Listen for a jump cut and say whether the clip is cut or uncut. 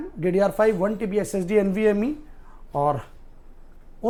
uncut